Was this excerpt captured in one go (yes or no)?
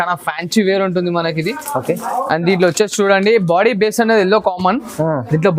yes